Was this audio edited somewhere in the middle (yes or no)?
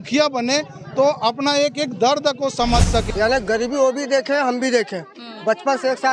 yes